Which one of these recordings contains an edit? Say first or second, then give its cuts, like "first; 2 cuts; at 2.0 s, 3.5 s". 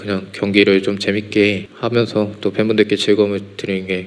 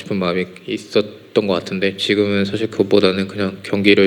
first; 1 cut; at 1.7 s